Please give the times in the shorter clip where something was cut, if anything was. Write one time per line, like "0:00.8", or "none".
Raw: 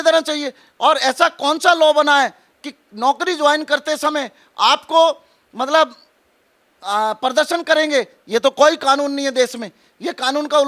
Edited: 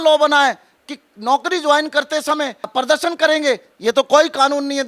0:02.7